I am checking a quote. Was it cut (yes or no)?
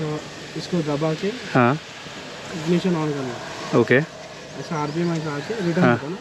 no